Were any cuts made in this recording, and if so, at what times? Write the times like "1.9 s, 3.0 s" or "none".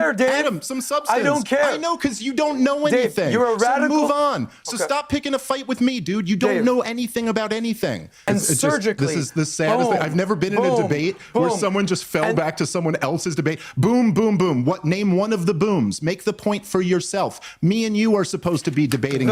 8.1 s